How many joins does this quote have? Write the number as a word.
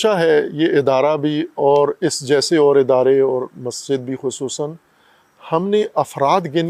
zero